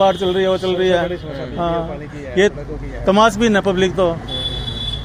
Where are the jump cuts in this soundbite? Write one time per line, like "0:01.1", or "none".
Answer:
none